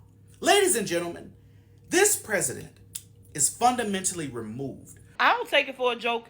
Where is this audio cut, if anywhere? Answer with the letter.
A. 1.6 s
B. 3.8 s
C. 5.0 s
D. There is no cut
C